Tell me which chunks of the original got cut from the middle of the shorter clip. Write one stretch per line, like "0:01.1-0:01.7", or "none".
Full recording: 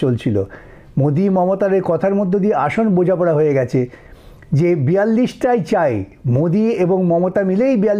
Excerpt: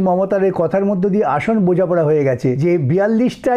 0:03.9-0:04.6